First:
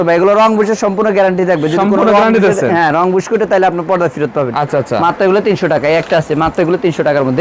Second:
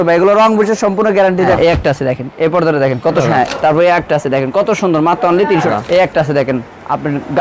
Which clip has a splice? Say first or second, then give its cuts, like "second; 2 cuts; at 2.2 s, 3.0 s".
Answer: second; 3 cuts; at 1.5 s, 3.2 s, 5.7 s